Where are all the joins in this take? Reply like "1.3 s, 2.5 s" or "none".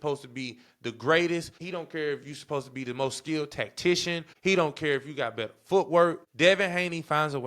1.6 s, 4.3 s, 6.2 s